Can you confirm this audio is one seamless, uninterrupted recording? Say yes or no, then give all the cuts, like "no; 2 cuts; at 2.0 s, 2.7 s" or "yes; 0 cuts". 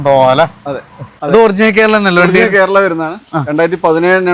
no; 1 cut; at 1.1 s